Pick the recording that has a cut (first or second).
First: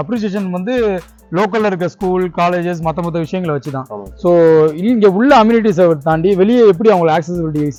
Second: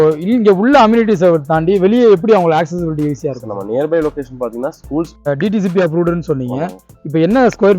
second